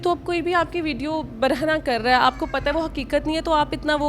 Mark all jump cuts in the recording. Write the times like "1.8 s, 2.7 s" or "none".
none